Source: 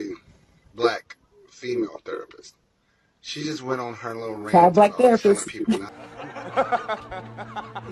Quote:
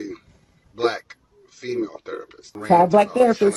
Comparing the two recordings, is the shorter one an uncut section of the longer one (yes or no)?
no